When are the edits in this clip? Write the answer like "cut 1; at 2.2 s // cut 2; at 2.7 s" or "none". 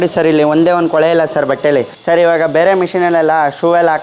cut 1; at 1.9 s